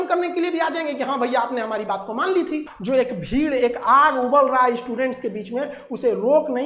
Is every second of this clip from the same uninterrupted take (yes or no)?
yes